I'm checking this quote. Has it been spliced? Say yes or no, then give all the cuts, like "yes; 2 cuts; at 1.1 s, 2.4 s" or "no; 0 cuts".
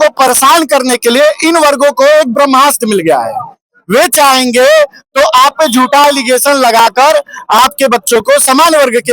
no; 0 cuts